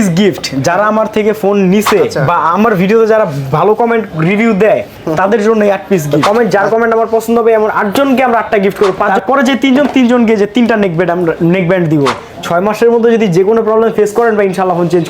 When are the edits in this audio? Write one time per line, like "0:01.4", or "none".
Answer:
0:02.1
0:06.2
0:09.1
0:12.3